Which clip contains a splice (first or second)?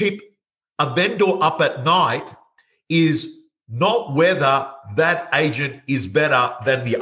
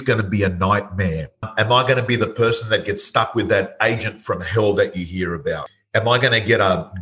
second